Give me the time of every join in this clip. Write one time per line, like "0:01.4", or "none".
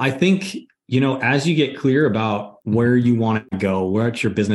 none